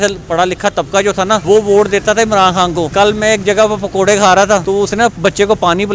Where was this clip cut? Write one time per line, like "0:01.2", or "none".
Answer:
0:01.4
0:02.9
0:04.6